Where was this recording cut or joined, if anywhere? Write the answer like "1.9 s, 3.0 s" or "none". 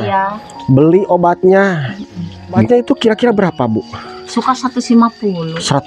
2.7 s